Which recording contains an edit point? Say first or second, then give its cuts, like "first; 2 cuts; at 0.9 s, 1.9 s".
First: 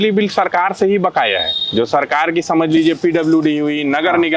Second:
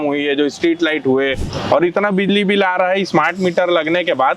second; 1 cut; at 1.4 s